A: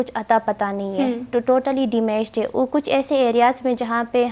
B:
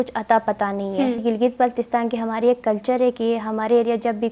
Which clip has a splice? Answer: B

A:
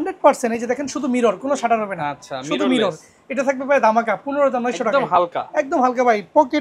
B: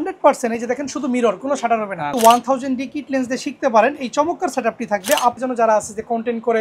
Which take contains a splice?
B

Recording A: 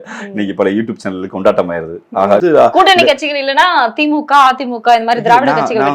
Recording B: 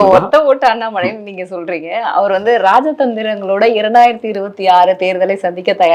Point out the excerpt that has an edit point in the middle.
A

